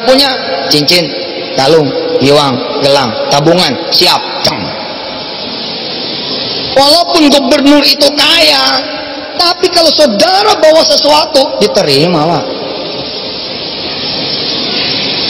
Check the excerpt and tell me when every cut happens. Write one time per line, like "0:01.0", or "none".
none